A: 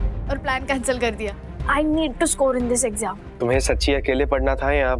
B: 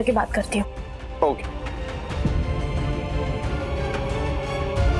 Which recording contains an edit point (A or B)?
A